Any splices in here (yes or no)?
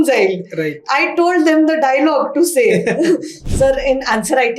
yes